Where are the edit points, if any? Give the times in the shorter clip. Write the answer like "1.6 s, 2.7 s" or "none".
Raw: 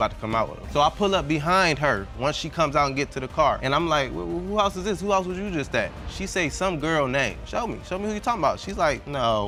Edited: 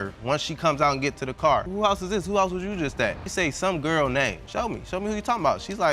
1.7 s, 3.2 s